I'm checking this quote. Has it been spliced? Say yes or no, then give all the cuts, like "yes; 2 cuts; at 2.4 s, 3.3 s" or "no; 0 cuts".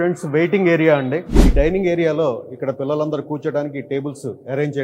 yes; 1 cut; at 1.5 s